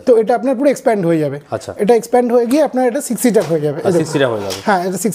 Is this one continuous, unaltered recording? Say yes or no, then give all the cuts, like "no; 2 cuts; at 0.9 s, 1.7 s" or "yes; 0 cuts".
yes; 0 cuts